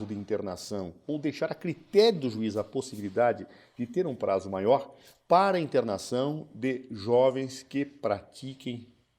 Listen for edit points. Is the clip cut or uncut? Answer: cut